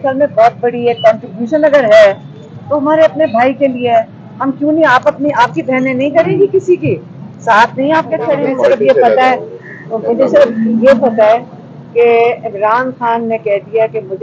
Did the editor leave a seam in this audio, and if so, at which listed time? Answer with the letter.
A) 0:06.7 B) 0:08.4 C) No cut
B